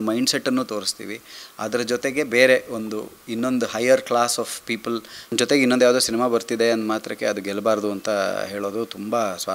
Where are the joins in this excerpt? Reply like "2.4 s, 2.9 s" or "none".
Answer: 5.3 s